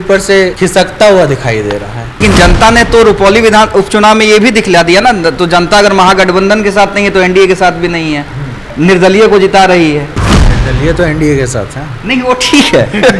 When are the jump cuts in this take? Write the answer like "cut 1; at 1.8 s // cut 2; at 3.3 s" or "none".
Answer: cut 1; at 2.2 s